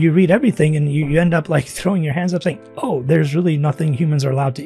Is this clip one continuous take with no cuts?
yes; 0 cuts

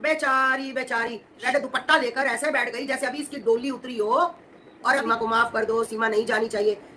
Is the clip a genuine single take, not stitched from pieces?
no; 2 cuts; at 1.4 s, 5.0 s

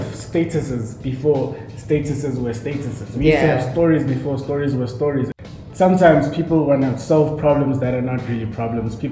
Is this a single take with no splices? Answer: no; 1 cut; at 5.3 s

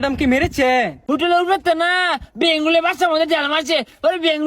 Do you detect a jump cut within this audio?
yes; 1 cut; at 1.0 s

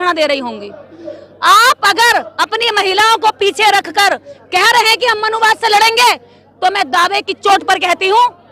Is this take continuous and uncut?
yes; 0 cuts

